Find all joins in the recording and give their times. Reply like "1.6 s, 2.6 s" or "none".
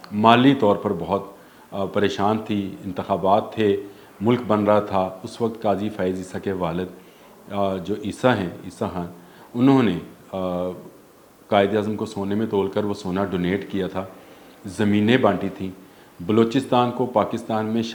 none